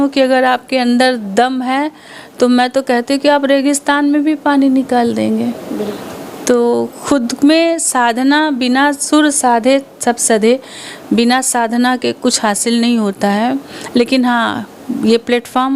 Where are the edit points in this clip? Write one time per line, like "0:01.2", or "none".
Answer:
none